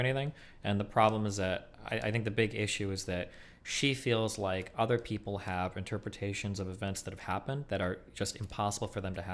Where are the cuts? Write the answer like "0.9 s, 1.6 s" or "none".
none